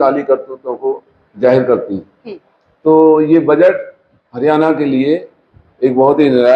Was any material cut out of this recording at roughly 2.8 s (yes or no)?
no